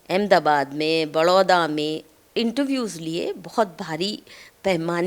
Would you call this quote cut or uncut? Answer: cut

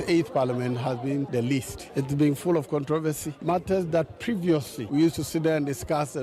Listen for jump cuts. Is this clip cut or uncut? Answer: cut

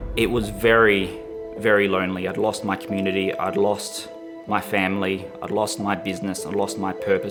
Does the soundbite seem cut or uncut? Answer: uncut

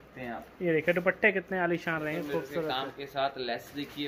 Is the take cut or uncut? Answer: uncut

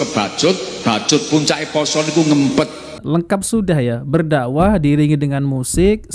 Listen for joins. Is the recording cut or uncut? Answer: cut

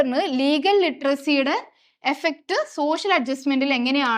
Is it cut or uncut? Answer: uncut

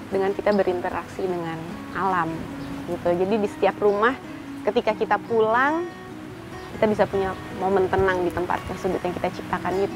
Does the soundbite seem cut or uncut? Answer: uncut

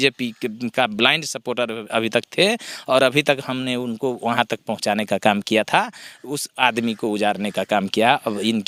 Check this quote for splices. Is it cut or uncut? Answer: uncut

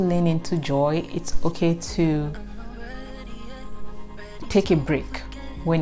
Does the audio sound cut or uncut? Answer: uncut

